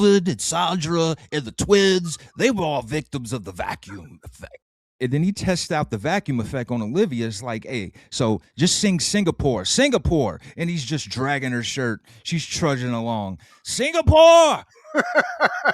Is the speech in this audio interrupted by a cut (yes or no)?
no